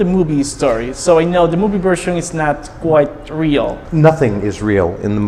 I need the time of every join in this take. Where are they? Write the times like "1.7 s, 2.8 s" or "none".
none